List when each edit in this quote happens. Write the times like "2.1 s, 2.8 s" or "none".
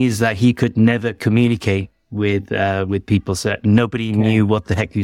none